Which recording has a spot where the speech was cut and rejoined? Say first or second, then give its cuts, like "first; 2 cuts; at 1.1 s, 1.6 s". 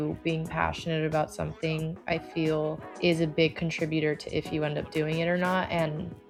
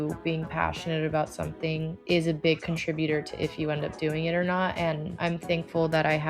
second; 2 cuts; at 2.0 s, 5.1 s